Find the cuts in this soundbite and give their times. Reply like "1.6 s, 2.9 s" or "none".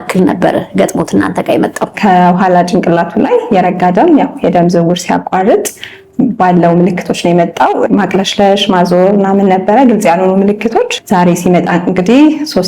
1.9 s, 7.9 s, 11.0 s